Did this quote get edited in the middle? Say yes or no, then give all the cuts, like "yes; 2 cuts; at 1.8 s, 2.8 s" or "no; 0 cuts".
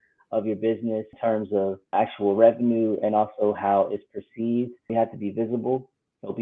yes; 3 cuts; at 1.1 s, 1.9 s, 4.9 s